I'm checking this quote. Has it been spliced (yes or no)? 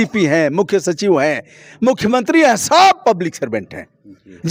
no